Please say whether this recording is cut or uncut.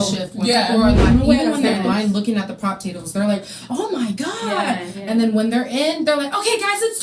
cut